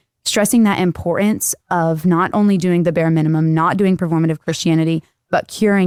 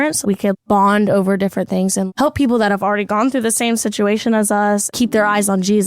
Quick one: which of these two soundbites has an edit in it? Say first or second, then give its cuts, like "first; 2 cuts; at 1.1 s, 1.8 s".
second; 1 cut; at 4.9 s